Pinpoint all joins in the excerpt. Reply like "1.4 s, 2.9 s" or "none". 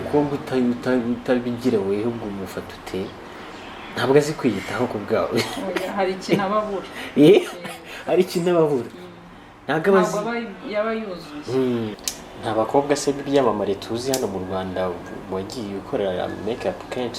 12.0 s